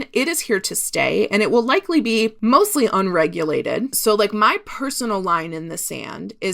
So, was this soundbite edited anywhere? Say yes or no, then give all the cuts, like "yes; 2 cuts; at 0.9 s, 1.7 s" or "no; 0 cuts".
yes; 2 cuts; at 2.3 s, 3.9 s